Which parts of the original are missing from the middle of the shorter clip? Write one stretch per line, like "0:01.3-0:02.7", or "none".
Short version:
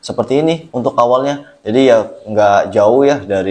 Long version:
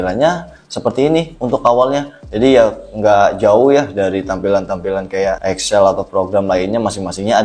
none